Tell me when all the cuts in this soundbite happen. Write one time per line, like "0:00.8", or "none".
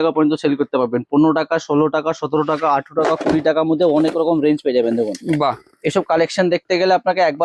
none